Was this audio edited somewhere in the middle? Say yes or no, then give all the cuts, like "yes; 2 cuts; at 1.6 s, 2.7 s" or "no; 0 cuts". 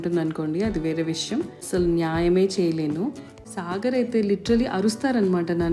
yes; 2 cuts; at 1.6 s, 3.3 s